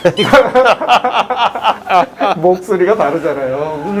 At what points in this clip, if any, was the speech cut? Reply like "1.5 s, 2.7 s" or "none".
none